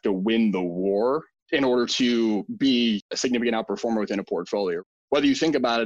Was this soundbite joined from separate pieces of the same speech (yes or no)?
yes